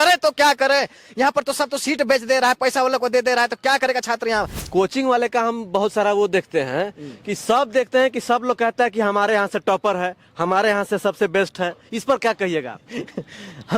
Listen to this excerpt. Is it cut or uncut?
cut